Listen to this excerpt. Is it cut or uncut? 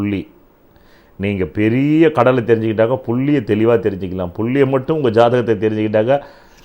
uncut